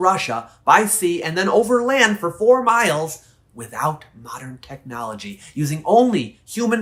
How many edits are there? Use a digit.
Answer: 0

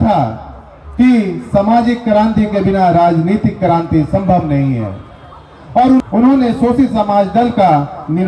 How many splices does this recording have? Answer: 1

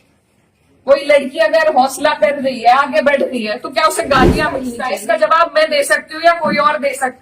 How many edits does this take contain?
1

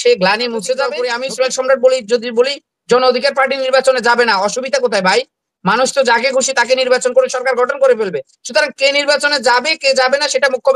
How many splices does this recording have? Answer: 1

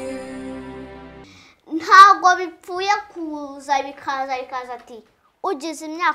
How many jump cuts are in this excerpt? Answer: 1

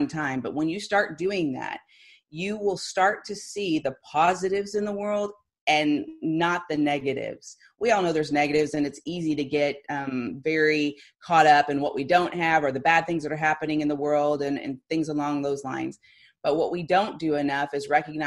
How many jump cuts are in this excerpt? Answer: 0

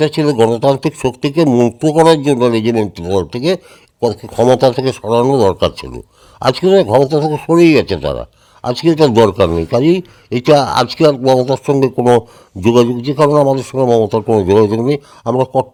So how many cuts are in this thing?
0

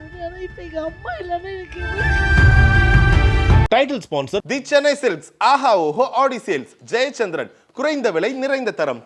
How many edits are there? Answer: 1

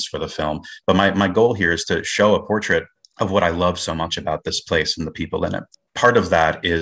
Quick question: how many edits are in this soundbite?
2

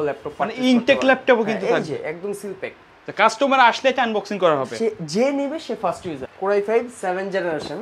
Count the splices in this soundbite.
1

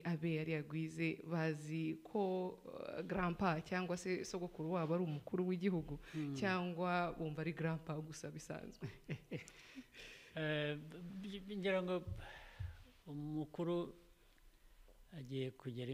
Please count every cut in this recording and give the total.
0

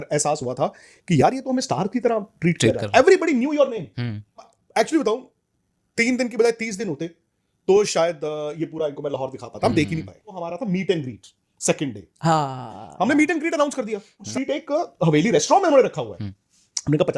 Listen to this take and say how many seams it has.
3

